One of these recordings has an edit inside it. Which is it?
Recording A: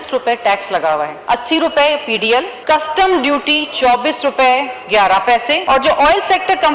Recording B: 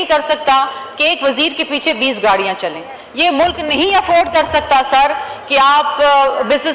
A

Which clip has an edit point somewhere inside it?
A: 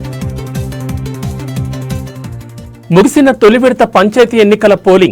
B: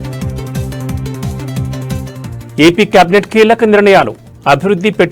A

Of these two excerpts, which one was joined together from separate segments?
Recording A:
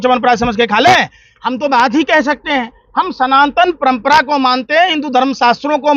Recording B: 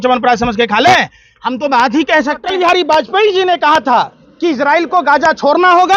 B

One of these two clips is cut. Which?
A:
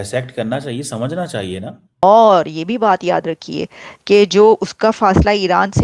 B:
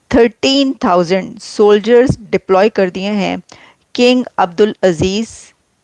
A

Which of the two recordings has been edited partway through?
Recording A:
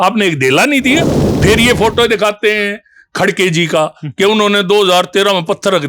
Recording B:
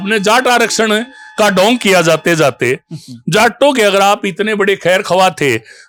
A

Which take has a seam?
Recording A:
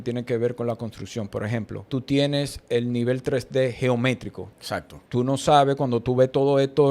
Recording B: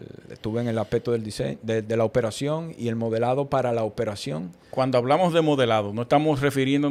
A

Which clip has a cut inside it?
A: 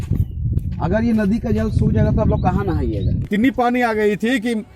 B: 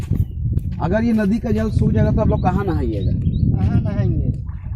A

